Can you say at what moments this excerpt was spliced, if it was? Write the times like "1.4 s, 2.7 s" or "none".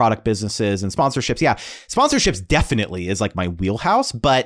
0.9 s